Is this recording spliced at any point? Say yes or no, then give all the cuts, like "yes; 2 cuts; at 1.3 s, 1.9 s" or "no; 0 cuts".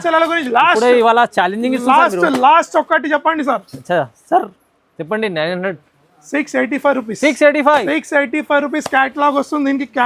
no; 0 cuts